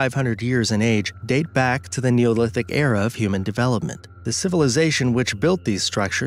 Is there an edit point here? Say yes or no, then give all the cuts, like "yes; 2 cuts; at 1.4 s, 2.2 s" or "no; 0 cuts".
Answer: no; 0 cuts